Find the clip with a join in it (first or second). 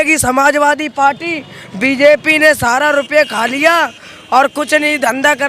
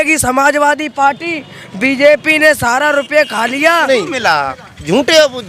second